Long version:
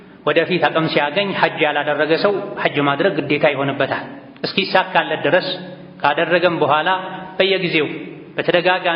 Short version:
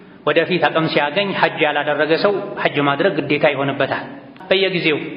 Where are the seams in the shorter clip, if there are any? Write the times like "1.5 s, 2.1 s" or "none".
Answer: 4.3 s

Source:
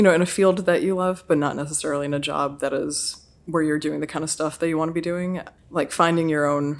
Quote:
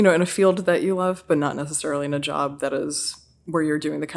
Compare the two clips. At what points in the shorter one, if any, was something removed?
none

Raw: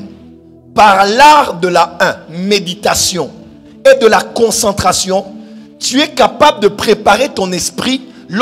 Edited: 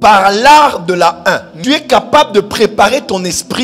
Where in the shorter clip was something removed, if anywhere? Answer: 1.5 s

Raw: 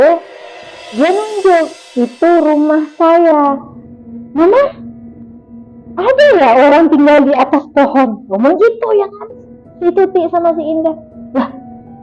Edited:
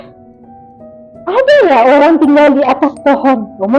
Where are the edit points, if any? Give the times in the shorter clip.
none

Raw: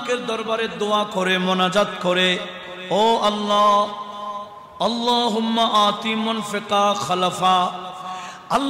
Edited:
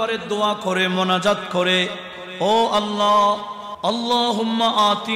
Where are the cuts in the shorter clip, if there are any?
3.7 s

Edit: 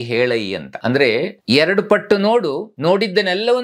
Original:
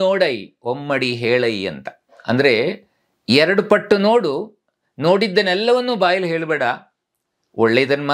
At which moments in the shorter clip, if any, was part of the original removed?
1.0 s, 2.7 s

